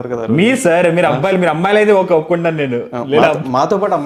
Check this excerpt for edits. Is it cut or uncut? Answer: uncut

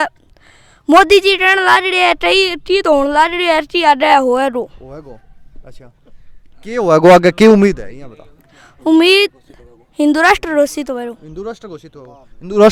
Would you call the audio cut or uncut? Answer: uncut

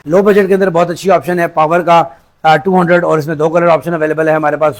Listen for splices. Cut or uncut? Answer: uncut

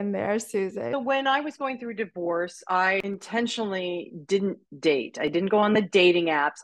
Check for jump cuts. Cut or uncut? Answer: cut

